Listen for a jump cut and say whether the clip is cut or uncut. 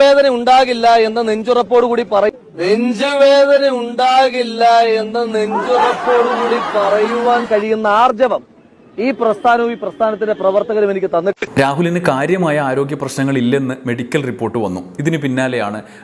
cut